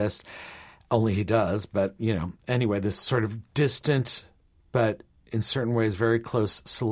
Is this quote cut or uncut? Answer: uncut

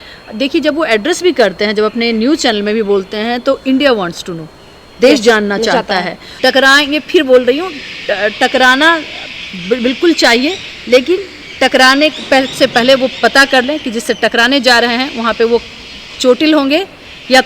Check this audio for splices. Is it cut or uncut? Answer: cut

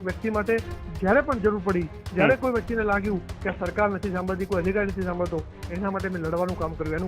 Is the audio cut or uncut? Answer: uncut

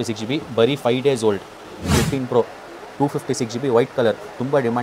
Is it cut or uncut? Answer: cut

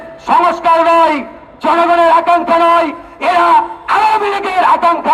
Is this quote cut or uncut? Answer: uncut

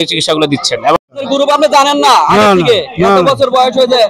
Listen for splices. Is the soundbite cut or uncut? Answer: cut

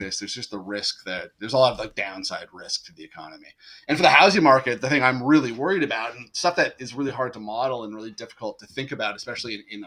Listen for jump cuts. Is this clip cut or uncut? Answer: uncut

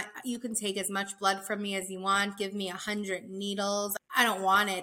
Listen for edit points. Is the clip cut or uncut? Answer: cut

